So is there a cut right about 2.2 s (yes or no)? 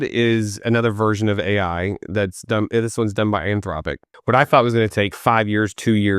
no